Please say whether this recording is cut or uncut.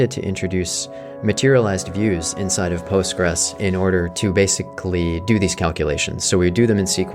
uncut